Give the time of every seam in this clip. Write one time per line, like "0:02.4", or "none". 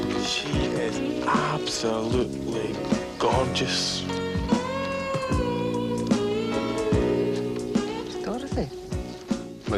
0:02.0

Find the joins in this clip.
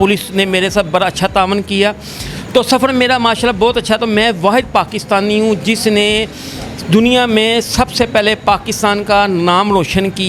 none

